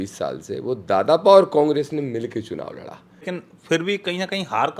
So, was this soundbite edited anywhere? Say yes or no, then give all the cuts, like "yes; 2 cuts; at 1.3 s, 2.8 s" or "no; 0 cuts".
yes; 1 cut; at 3.3 s